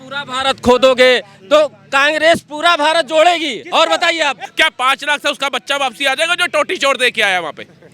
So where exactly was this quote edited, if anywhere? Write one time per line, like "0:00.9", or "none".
0:04.5